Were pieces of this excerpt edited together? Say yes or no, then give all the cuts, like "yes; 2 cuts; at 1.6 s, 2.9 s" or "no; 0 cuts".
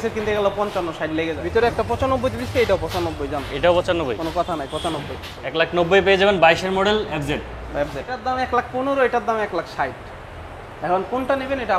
yes; 3 cuts; at 1.4 s, 5.6 s, 8.2 s